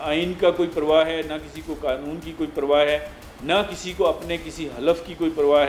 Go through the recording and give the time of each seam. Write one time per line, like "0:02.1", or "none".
none